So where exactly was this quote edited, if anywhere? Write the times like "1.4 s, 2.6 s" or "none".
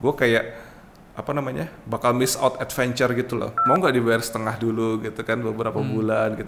3.6 s

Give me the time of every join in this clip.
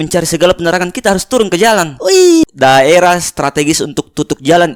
2.4 s

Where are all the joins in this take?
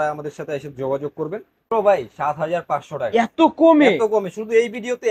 1.5 s

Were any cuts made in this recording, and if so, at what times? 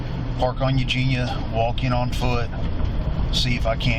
none

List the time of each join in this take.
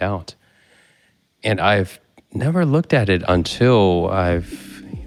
none

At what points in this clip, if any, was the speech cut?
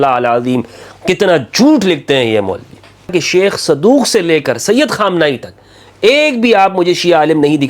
3.1 s

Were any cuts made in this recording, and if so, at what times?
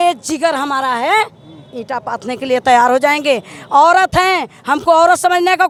none

